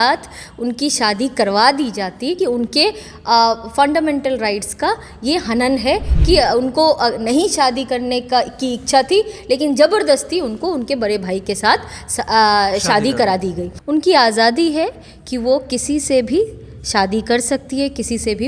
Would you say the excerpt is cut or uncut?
cut